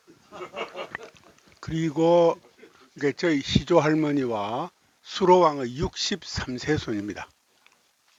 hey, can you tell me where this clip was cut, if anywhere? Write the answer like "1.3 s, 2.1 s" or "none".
none